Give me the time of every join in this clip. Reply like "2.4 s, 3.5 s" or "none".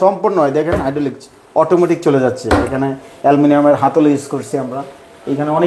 none